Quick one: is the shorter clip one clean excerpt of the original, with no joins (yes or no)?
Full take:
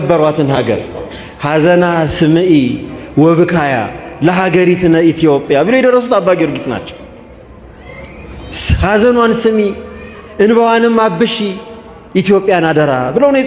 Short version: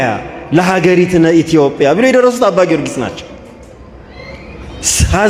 yes